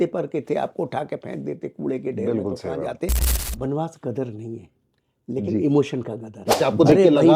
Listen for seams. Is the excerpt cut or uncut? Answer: cut